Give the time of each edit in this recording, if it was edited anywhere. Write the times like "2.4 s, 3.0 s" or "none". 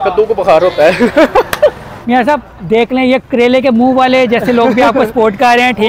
1.9 s, 3.3 s